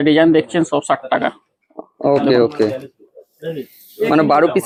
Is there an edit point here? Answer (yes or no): no